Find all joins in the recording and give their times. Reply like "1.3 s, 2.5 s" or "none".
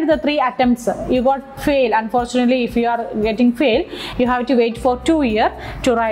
none